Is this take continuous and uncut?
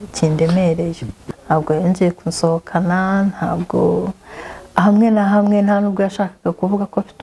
no; 1 cut; at 1.1 s

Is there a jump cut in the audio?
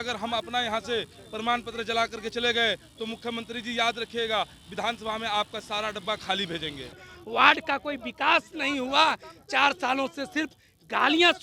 yes; 1 cut; at 7.1 s

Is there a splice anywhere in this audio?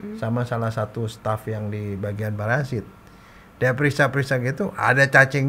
no; 0 cuts

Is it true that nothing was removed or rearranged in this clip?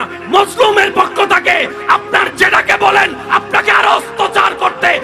yes; 0 cuts

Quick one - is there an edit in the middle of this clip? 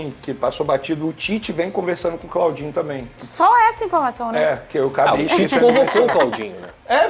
no; 0 cuts

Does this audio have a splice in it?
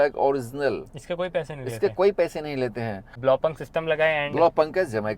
yes; 1 cut; at 3.1 s

